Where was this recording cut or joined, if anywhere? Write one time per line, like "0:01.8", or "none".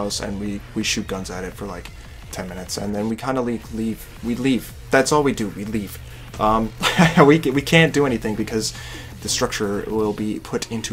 none